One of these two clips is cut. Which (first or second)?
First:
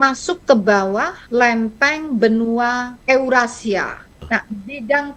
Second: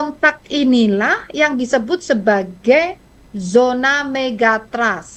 first